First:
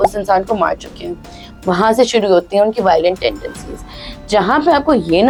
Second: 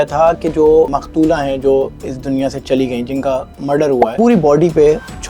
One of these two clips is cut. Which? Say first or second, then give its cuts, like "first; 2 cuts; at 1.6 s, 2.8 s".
second; 2 cuts; at 0.9 s, 4.1 s